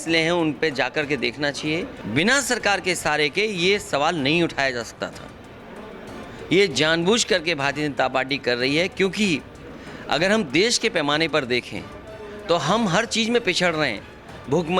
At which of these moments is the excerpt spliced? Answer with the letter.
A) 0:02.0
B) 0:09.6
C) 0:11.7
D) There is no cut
A